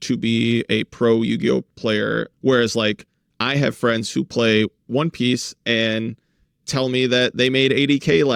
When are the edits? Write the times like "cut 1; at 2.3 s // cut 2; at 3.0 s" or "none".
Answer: none